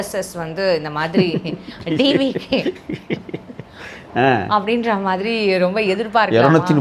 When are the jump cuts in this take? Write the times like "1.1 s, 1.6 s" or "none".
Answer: none